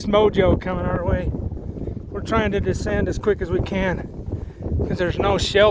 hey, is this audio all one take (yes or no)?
yes